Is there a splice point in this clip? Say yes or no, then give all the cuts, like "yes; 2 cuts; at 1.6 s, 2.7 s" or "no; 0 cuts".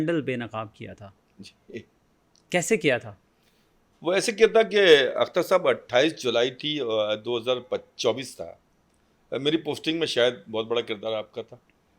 no; 0 cuts